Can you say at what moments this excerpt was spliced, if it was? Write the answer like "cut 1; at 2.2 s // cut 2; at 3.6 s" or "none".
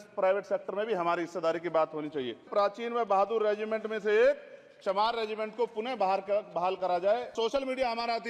cut 1; at 2.5 s // cut 2; at 7.3 s